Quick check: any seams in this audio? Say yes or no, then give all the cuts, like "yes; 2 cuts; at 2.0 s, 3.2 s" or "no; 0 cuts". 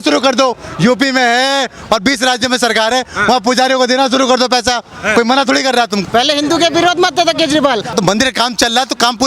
yes; 2 cuts; at 6.0 s, 7.9 s